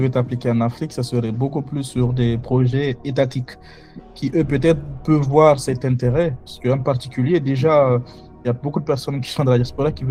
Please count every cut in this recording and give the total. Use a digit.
0